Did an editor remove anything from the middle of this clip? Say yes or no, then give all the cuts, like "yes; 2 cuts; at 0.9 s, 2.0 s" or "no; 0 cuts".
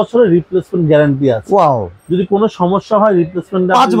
no; 0 cuts